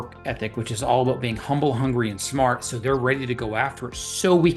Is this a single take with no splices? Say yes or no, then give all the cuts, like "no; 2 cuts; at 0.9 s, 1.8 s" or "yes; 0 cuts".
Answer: yes; 0 cuts